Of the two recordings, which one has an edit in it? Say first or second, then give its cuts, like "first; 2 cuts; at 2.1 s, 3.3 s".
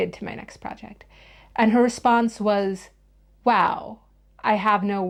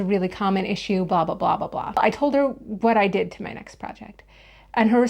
second; 1 cut; at 2.0 s